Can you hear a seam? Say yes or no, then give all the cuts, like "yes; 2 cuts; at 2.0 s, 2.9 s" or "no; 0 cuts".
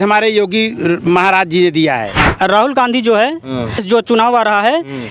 yes; 2 cuts; at 2.2 s, 3.8 s